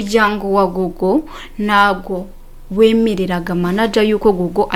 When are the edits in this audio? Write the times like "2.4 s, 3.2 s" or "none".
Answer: none